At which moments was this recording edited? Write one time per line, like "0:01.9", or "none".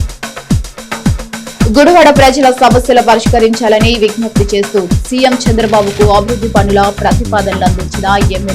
0:01.6